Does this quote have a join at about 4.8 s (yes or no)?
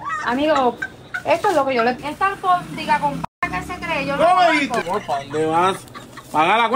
yes